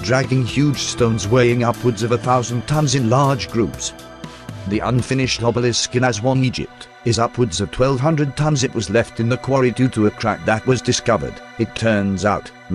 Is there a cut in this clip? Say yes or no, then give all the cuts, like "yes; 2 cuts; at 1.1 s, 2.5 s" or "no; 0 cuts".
no; 0 cuts